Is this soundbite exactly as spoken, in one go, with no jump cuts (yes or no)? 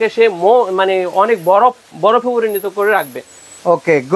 yes